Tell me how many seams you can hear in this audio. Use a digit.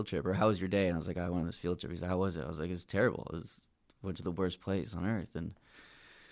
0